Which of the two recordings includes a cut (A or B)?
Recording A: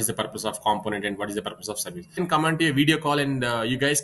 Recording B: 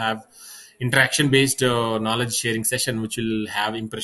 A